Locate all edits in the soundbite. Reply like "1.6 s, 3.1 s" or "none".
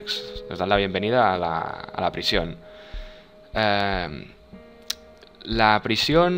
3.3 s